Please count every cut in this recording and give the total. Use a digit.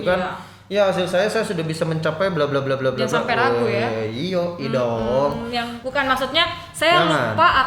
1